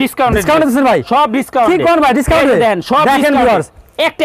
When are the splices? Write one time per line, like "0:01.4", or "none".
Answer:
none